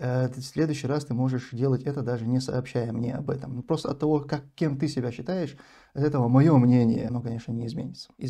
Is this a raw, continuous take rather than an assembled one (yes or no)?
no